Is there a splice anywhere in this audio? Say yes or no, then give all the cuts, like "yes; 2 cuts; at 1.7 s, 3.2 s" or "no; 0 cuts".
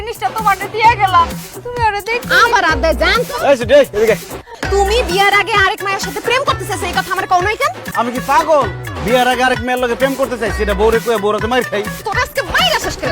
yes; 3 cuts; at 4.5 s, 7.8 s, 12.0 s